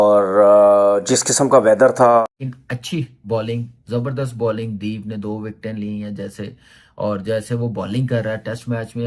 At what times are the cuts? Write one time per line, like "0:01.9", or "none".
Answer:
0:02.2